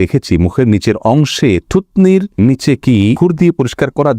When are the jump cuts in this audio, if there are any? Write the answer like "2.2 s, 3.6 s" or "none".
2.3 s, 3.2 s